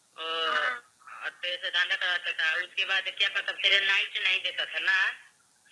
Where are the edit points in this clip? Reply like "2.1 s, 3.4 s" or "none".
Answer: none